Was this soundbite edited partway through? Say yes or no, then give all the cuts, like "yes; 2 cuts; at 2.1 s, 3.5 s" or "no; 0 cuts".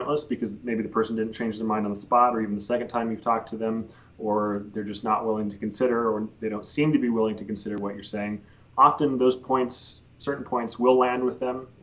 no; 0 cuts